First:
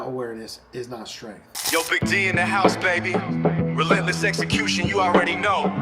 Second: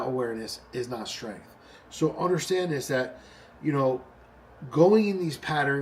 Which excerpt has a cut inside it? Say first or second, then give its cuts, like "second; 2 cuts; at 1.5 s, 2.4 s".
first; 1 cut; at 1.6 s